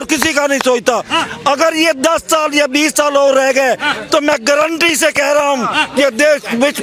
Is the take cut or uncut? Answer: uncut